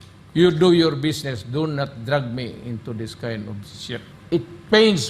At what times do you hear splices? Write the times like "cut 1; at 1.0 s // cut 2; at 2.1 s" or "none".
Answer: cut 1; at 4.1 s